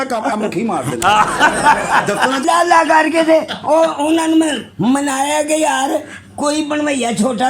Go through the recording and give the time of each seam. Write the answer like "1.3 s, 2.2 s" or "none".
2.4 s